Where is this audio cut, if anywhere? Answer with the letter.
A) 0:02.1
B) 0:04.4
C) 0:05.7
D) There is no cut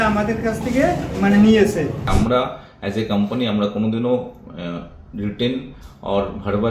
A